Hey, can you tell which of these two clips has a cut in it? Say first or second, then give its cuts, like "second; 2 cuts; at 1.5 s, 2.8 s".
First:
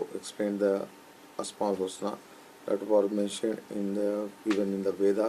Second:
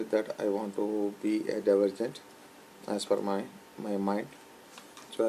first; 1 cut; at 2.1 s